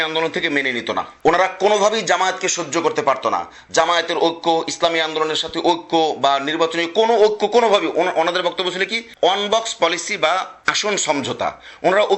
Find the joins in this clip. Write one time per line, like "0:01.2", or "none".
none